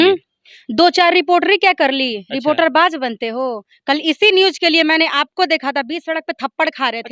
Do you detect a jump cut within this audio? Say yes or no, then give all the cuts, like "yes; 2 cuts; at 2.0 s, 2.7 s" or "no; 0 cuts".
no; 0 cuts